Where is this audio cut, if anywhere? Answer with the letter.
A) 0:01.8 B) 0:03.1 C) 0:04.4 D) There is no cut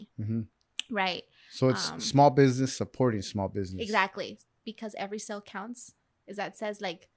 C